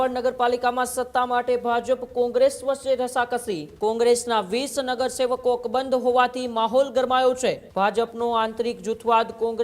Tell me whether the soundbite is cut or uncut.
cut